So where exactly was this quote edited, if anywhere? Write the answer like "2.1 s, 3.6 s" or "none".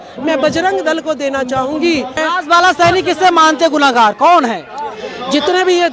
2.2 s